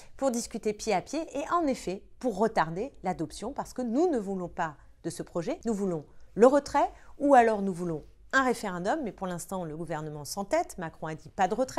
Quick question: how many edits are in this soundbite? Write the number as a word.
one